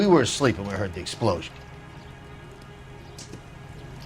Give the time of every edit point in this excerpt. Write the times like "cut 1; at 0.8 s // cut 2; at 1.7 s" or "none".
none